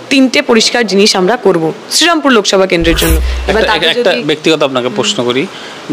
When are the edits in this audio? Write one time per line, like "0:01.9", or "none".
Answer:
0:03.3